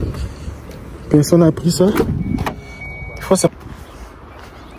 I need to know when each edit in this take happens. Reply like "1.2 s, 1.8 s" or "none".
3.5 s